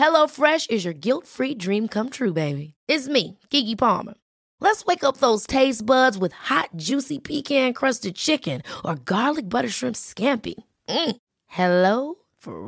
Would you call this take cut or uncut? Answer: uncut